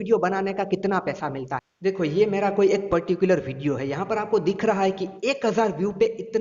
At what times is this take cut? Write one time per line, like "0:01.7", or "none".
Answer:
0:01.6